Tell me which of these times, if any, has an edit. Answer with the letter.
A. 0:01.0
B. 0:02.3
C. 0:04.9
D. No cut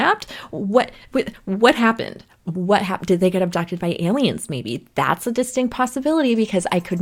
D